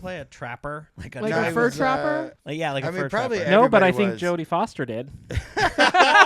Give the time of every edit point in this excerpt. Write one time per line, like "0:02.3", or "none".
0:00.9
0:02.4